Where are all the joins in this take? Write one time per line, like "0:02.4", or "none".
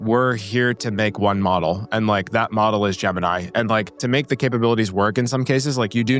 0:04.0